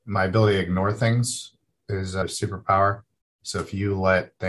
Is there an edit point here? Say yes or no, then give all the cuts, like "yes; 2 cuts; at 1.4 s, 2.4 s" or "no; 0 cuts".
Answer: yes; 1 cut; at 2.2 s